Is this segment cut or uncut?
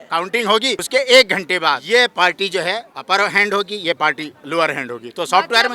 cut